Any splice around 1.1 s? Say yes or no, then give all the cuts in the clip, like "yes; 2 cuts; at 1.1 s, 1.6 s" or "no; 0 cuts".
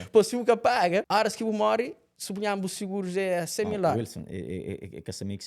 yes; 1 cut; at 1.1 s